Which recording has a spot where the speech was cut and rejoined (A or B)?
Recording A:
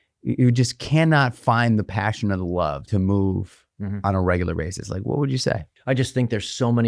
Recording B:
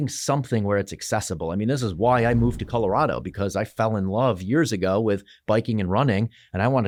A